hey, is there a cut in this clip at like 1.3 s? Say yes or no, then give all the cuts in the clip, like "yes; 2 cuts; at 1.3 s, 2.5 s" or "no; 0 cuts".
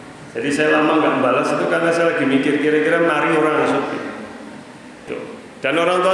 no; 1 cut; at 5.1 s